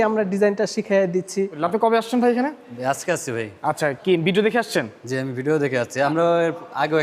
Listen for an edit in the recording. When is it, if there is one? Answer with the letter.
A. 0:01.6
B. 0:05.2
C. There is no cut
A